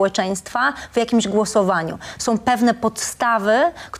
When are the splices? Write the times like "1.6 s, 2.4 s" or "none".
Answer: none